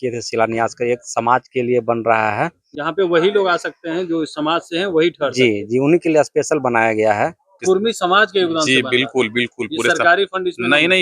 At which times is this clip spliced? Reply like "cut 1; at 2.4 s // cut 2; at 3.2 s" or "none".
cut 1; at 2.7 s // cut 2; at 7.5 s